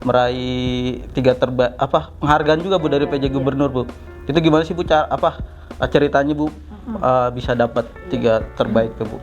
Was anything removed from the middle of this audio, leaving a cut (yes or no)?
no